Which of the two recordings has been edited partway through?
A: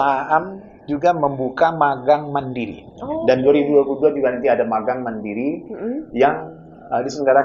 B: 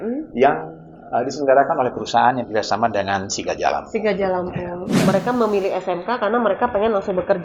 B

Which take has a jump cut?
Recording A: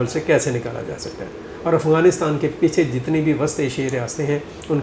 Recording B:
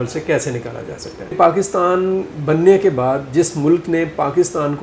B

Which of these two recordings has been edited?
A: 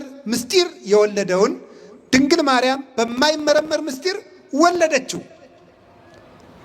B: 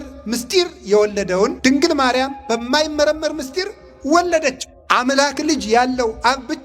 B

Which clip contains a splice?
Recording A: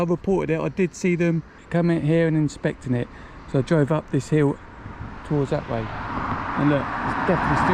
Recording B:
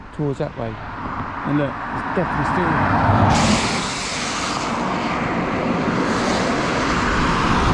A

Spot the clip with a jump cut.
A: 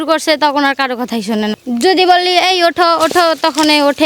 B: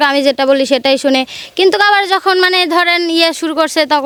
A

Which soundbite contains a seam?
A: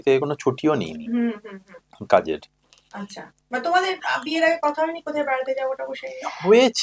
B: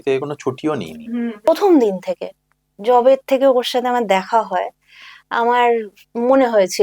B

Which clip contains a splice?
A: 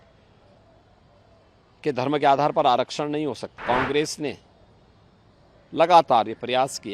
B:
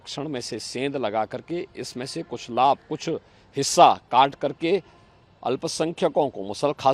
A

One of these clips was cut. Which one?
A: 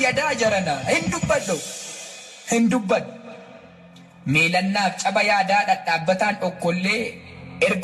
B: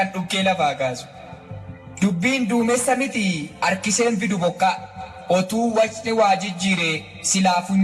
B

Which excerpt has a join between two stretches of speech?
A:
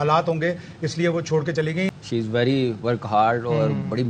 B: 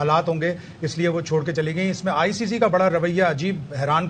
A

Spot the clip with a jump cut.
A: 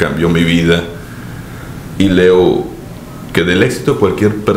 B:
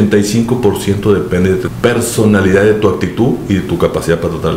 B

